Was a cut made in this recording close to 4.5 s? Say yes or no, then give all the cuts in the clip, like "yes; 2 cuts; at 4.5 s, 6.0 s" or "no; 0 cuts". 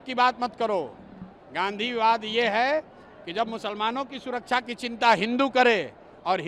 no; 0 cuts